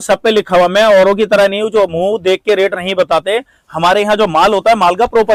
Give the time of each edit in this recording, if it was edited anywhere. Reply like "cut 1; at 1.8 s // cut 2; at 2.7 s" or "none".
none